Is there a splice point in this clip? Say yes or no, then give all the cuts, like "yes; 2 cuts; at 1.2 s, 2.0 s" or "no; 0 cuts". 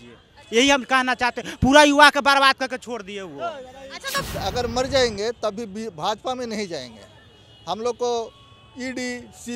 yes; 1 cut; at 4.2 s